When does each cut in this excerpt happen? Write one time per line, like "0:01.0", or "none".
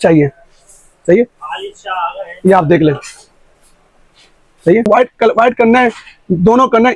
0:04.9